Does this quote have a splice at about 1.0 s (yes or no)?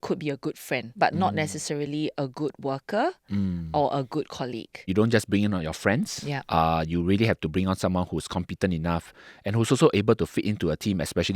yes